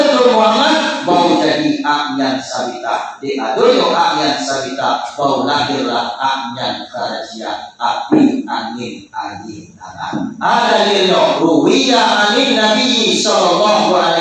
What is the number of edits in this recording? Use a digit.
1